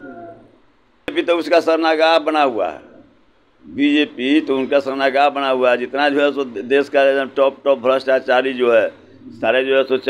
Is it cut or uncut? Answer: cut